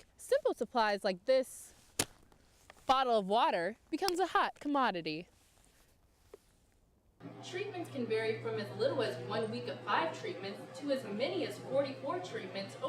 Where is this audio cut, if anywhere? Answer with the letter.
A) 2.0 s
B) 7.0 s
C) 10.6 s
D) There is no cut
B